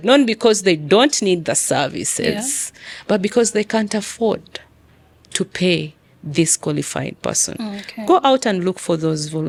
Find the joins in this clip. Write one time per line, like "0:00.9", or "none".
none